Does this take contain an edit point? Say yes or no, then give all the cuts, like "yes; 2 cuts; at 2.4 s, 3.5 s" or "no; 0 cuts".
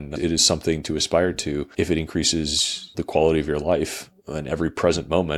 yes; 2 cuts; at 1.7 s, 2.9 s